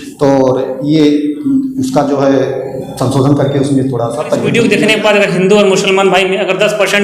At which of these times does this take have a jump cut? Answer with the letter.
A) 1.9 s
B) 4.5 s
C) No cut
B